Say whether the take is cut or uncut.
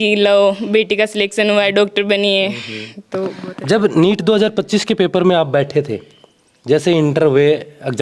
uncut